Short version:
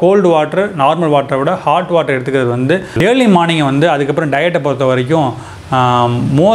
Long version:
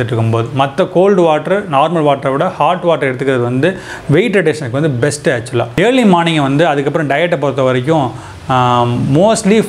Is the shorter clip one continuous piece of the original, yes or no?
no